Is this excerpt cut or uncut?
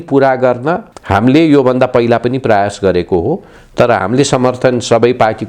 cut